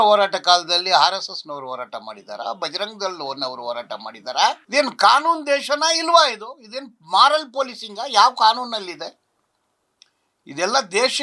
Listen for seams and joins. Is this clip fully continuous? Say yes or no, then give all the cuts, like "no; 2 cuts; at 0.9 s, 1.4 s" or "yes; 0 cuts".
no; 1 cut; at 4.6 s